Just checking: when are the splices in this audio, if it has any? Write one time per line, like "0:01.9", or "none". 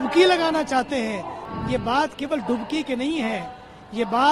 0:01.3